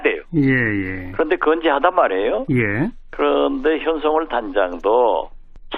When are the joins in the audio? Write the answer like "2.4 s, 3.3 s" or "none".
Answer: 2.7 s